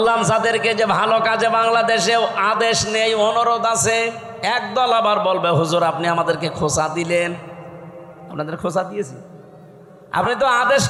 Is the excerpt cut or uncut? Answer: uncut